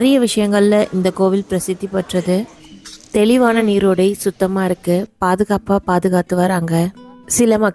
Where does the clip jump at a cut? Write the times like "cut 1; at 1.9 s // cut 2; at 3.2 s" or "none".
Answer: cut 1; at 2.5 s